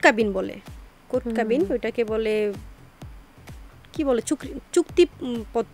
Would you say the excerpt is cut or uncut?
uncut